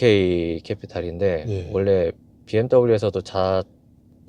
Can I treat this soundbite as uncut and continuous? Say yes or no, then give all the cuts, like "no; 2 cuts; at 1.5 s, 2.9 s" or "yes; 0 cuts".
yes; 0 cuts